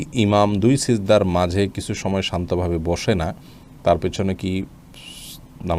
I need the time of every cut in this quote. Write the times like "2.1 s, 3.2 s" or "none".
none